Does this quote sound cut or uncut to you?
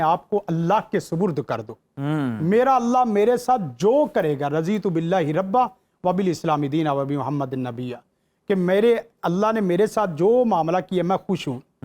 uncut